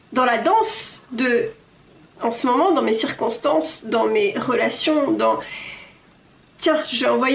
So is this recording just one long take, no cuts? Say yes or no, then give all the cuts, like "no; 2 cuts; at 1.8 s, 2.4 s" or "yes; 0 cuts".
yes; 0 cuts